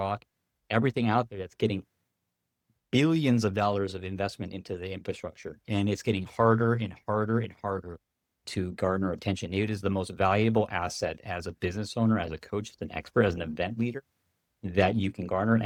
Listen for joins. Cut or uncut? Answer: uncut